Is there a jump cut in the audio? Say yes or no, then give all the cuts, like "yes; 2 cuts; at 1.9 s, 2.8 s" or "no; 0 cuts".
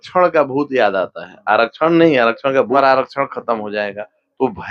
yes; 1 cut; at 2.8 s